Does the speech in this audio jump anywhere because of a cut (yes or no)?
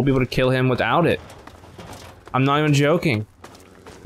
no